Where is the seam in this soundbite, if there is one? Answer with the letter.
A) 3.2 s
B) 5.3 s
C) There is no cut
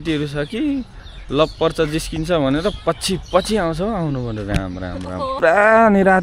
B